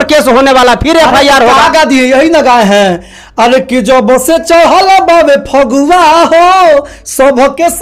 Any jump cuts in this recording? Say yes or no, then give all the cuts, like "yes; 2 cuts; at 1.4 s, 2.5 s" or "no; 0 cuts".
no; 0 cuts